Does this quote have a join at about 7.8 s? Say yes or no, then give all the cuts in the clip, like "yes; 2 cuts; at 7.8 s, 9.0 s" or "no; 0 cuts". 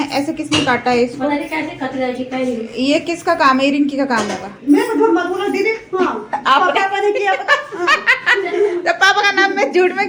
no; 0 cuts